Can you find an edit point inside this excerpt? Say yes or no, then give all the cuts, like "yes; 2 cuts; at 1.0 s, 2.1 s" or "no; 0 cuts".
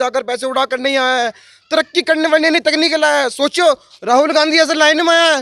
no; 0 cuts